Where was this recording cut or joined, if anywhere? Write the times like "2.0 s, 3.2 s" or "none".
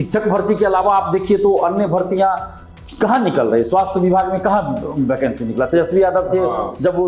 none